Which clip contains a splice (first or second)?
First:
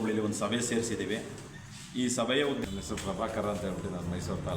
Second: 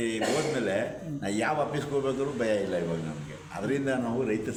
first